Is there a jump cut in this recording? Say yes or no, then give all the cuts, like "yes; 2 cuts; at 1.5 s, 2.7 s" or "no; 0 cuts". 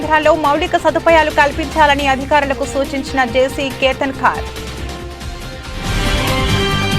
yes; 1 cut; at 4.5 s